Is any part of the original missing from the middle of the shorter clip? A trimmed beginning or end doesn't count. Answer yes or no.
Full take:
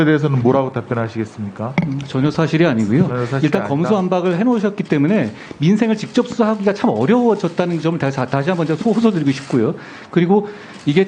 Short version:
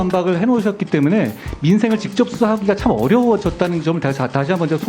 no